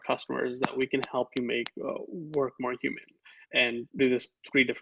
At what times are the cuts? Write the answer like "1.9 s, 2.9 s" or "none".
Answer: none